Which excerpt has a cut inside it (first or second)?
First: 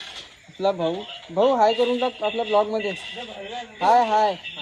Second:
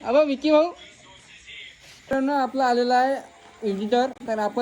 second